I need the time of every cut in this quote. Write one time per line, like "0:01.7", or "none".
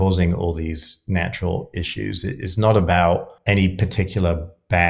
0:03.3